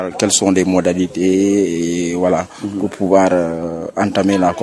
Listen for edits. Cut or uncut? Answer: uncut